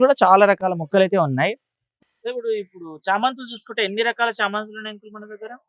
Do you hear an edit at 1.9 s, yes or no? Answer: yes